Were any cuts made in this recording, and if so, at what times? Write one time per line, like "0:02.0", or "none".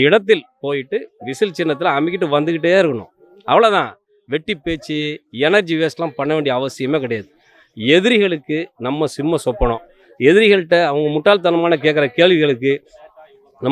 none